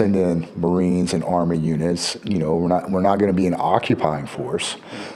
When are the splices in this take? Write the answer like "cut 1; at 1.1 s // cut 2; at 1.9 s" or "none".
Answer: none